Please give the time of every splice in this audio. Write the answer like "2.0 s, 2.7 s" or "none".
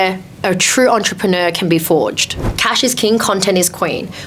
2.6 s